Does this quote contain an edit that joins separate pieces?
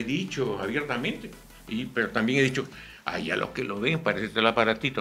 no; 0 cuts

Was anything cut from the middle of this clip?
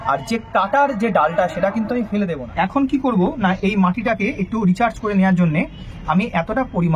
yes; 1 cut; at 2.4 s

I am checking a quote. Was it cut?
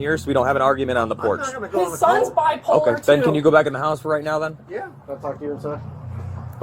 no; 0 cuts

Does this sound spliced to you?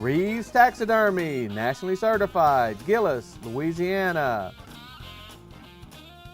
yes; 1 cut; at 5.2 s

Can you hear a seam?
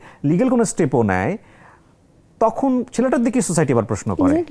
no; 0 cuts

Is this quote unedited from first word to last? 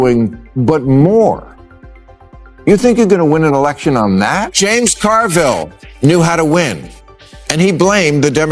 no; 1 cut; at 4.5 s

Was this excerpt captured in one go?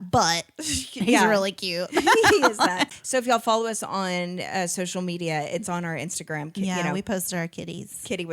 no; 1 cut; at 2.9 s

